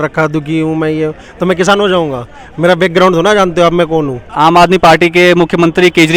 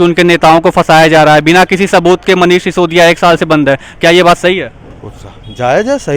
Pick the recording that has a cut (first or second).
first